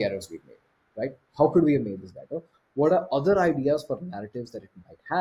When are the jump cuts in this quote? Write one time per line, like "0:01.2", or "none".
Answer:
none

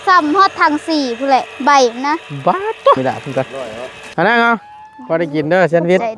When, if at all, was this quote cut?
0:03.0

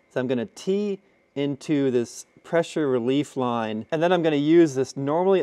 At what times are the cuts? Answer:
0:03.8

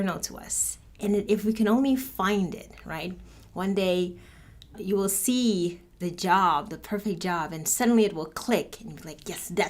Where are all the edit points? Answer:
0:04.8
0:05.9

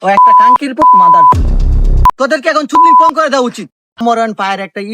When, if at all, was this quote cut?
0:02.1
0:04.0

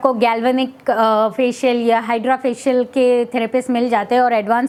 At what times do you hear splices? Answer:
none

